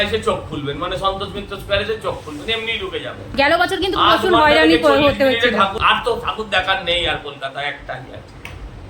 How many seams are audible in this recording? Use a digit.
1